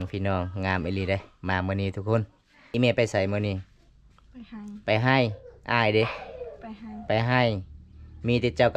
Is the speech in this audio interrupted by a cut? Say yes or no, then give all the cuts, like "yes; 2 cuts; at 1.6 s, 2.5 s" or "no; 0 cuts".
yes; 1 cut; at 2.6 s